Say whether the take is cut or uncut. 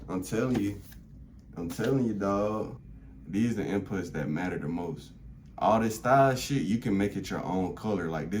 cut